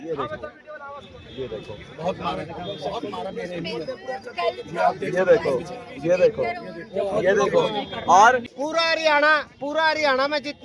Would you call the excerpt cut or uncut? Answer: cut